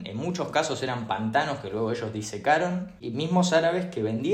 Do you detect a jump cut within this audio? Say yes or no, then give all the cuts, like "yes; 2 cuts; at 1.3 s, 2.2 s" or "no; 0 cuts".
yes; 1 cut; at 3.0 s